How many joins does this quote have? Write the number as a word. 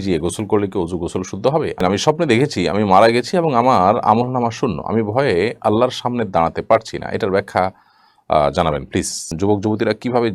two